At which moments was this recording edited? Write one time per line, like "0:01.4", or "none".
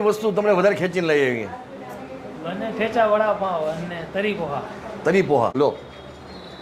0:05.5